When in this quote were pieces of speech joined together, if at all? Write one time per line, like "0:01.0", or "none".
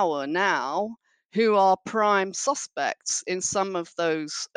none